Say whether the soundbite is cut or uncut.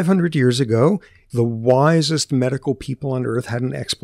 cut